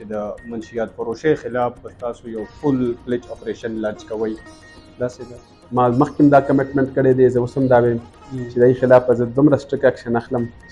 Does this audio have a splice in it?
yes; 1 cut; at 5.4 s

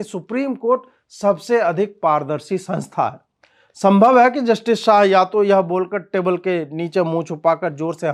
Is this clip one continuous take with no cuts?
yes; 0 cuts

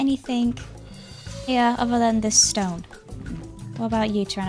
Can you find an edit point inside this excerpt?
no; 0 cuts

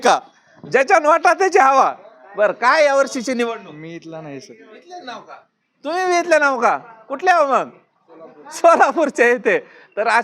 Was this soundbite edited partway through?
no; 0 cuts

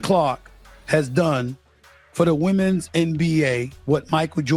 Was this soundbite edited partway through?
no; 0 cuts

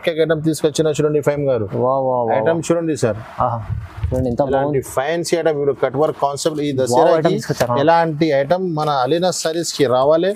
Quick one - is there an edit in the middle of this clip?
no; 0 cuts

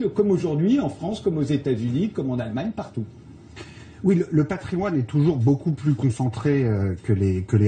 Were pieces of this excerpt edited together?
no; 0 cuts

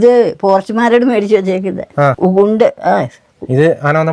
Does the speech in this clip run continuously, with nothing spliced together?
no; 1 cut; at 2.2 s

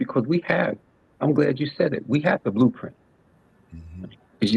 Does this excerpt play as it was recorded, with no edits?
yes; 0 cuts

